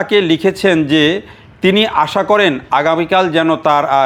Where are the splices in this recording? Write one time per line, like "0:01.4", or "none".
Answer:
none